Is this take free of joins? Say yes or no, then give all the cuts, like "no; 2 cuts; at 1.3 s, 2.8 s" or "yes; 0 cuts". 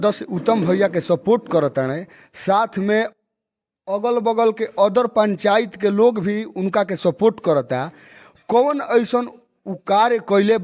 yes; 0 cuts